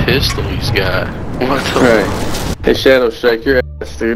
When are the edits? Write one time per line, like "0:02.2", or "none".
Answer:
0:02.5